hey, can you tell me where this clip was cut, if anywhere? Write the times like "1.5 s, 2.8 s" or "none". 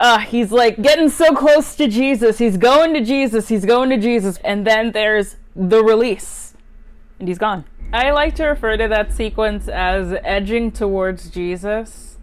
7.8 s